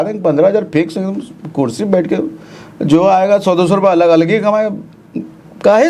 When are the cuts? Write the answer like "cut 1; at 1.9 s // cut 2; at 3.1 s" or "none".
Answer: none